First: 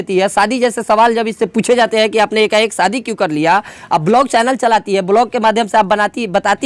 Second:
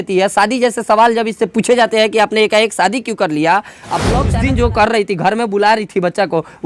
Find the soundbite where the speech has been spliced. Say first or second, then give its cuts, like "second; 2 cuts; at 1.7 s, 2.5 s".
second; 1 cut; at 4.3 s